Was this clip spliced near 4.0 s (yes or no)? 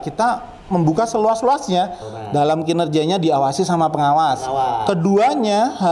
no